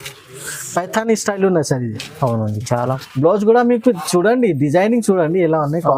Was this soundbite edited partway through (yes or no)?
yes